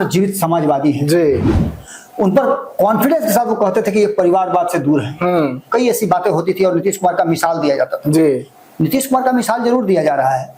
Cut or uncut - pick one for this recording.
uncut